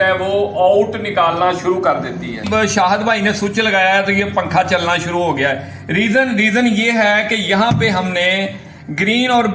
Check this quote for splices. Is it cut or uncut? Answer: cut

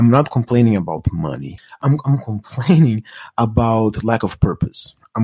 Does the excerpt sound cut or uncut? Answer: cut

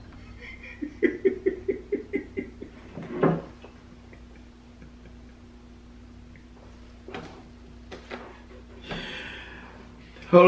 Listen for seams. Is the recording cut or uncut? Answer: uncut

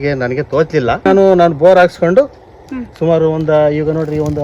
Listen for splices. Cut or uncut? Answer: cut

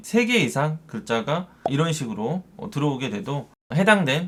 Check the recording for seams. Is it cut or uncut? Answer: uncut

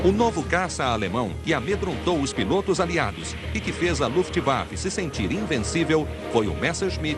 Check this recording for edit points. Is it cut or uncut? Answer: uncut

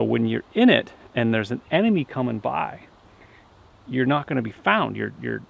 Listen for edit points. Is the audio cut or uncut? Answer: uncut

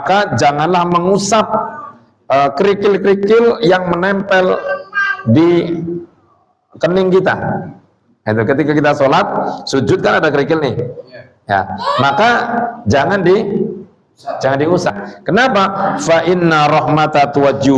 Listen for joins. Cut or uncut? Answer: cut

